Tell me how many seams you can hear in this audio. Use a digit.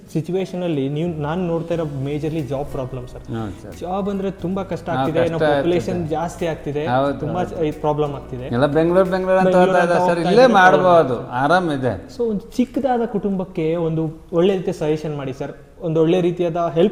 0